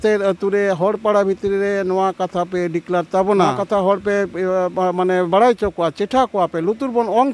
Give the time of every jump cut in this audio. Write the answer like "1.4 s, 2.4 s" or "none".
3.6 s